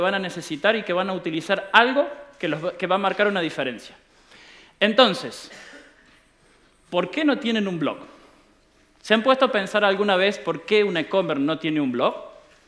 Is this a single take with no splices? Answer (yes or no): no